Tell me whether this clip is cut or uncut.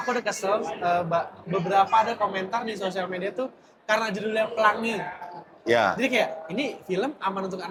uncut